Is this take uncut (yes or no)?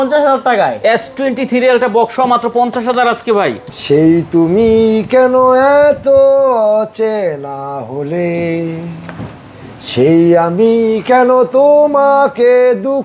no